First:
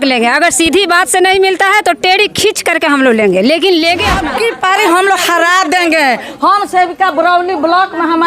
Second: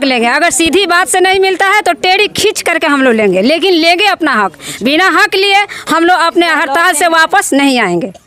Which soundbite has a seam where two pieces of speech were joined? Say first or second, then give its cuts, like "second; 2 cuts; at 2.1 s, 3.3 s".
first; 1 cut; at 4.3 s